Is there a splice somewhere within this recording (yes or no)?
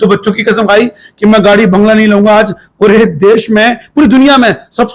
no